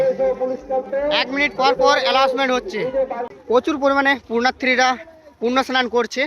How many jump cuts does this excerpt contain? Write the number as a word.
one